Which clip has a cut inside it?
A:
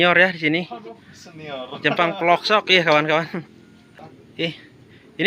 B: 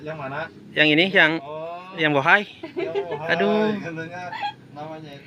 A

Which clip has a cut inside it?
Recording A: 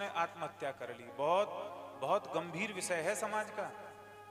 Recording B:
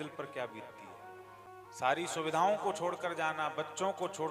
B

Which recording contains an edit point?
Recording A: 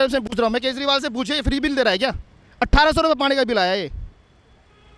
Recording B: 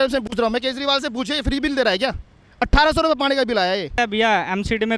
B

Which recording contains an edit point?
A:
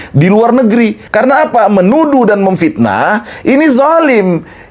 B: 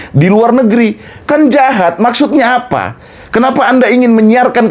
A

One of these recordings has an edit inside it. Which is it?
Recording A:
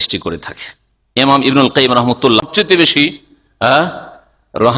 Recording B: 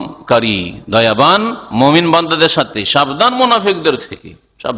A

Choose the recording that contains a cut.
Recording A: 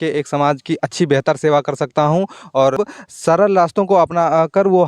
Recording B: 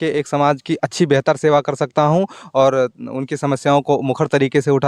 A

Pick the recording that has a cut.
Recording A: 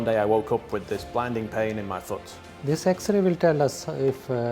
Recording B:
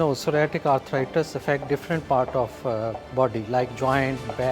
A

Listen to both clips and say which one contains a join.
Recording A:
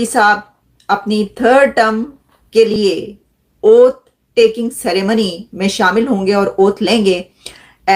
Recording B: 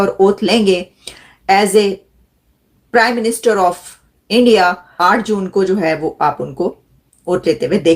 B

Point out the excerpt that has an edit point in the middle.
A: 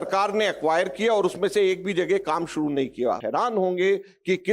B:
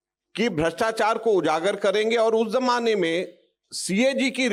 A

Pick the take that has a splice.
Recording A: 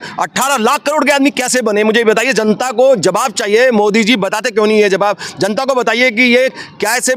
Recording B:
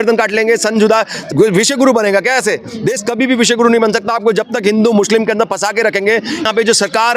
B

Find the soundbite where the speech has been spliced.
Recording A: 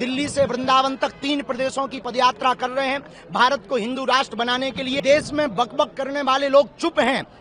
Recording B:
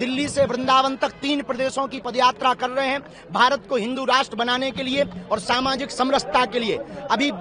A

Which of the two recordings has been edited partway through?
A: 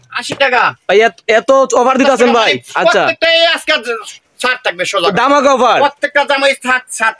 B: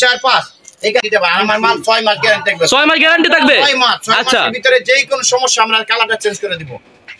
B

